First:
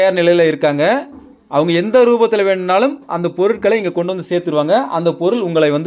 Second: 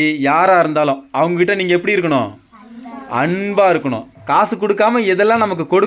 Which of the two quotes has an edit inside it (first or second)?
second